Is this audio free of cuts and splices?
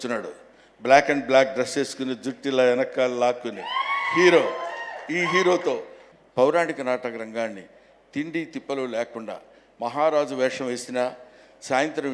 no; 1 cut; at 6.0 s

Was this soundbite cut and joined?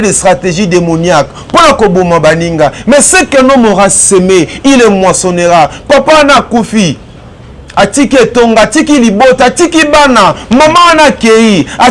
no; 0 cuts

